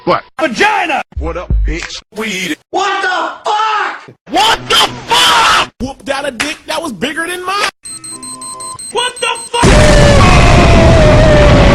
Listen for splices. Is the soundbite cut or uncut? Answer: uncut